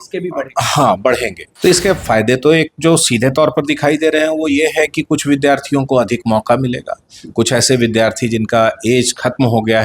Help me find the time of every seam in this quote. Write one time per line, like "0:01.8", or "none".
0:01.4